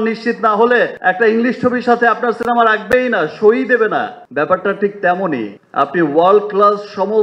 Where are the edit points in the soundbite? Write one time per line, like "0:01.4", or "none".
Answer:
none